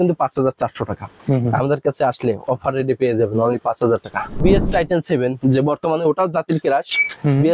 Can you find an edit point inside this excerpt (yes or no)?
yes